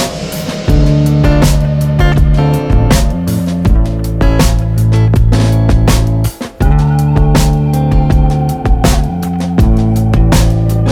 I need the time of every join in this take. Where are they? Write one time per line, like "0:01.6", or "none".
none